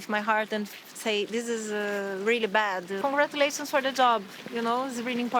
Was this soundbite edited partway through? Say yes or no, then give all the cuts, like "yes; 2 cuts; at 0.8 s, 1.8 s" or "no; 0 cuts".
yes; 1 cut; at 3.0 s